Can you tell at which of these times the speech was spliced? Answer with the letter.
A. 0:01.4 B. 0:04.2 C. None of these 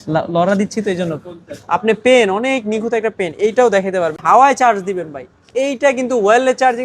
B